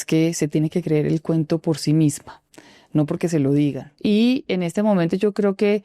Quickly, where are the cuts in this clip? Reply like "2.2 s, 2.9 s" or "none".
3.9 s